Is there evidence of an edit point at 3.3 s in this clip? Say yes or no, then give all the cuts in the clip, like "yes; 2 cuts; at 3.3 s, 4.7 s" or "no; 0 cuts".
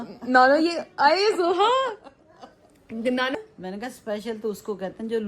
yes; 1 cut; at 3.3 s